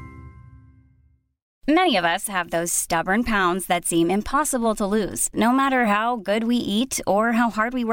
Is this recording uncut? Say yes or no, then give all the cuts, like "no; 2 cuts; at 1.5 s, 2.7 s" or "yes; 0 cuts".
yes; 0 cuts